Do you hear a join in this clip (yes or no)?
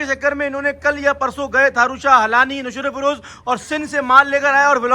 no